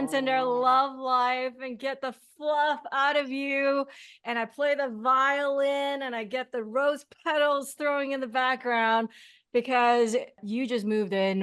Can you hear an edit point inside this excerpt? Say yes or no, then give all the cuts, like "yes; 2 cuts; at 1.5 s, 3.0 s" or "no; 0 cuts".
yes; 1 cut; at 10.4 s